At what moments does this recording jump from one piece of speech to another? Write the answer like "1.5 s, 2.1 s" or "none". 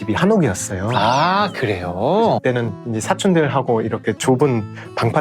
2.4 s